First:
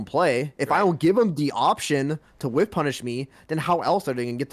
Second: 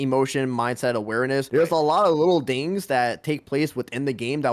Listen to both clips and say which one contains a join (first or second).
second